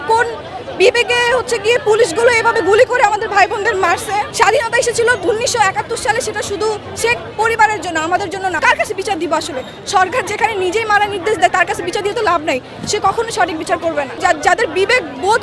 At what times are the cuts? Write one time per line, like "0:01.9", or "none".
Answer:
0:04.3
0:05.2
0:08.6
0:14.2